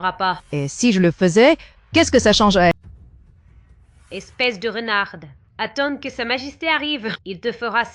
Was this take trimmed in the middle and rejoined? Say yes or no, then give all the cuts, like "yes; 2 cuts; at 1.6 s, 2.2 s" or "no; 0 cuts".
yes; 1 cut; at 2.7 s